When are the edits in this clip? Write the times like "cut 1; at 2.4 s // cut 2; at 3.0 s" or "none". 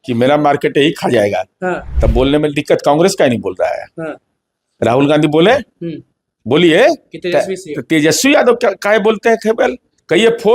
cut 1; at 1.9 s